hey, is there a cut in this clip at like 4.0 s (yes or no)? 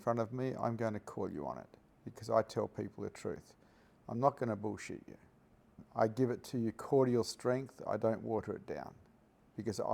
no